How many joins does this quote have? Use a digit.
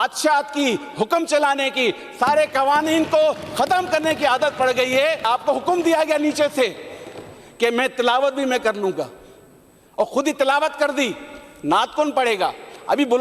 1